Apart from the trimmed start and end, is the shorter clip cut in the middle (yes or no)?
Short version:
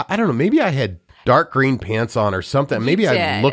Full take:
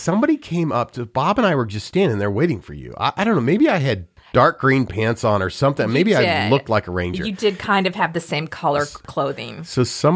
no